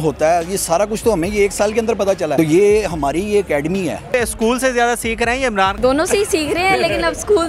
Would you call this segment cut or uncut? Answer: cut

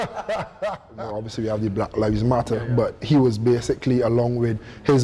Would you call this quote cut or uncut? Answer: cut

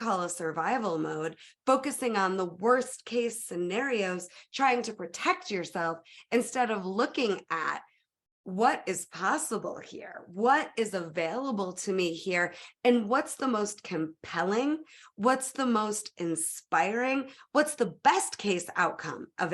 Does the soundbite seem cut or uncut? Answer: uncut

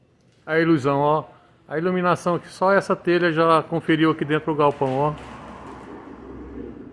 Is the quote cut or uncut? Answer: uncut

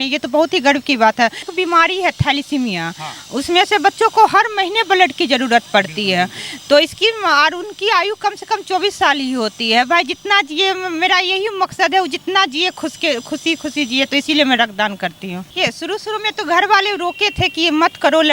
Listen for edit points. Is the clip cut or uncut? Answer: cut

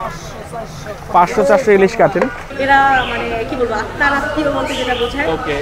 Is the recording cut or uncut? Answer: cut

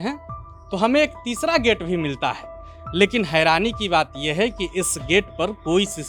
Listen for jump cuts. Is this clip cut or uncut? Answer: uncut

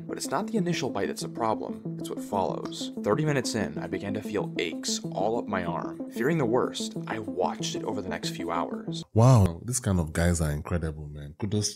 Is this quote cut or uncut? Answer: cut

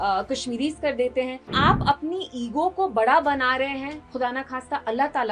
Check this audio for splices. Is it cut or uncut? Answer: cut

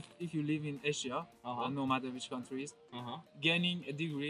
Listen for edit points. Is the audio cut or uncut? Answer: uncut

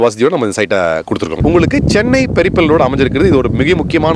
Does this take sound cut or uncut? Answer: cut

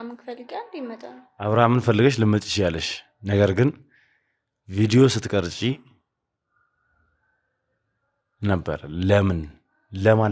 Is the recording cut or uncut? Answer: uncut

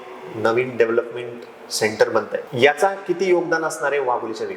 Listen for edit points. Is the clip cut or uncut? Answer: cut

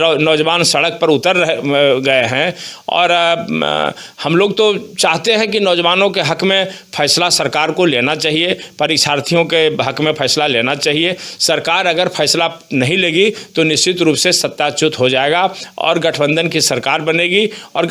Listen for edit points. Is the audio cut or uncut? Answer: uncut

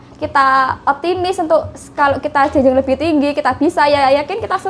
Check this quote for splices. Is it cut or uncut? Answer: uncut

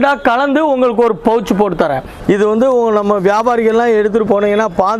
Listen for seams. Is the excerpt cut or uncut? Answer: cut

